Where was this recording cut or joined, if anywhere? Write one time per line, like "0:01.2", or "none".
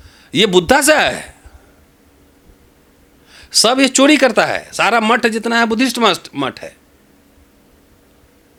none